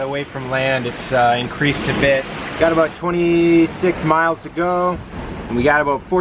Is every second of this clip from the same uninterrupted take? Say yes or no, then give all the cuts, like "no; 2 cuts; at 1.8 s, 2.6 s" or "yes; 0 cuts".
no; 1 cut; at 2.5 s